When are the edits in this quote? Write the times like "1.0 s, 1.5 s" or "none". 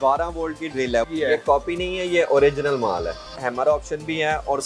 1.1 s, 3.4 s